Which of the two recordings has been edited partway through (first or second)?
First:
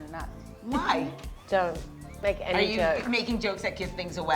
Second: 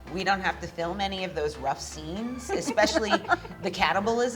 first